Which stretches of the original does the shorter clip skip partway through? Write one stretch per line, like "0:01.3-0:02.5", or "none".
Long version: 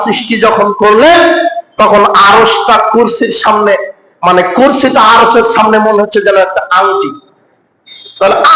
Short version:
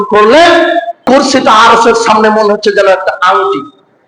0:01.7-0:04.5